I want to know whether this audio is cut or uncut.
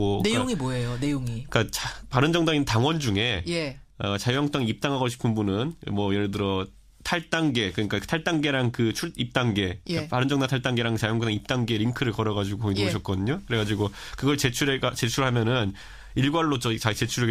uncut